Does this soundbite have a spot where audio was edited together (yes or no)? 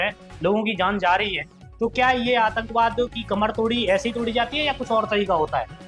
no